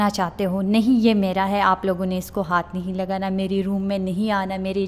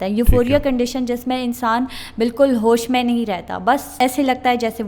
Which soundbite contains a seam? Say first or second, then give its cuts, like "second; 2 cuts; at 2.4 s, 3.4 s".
second; 1 cut; at 3.9 s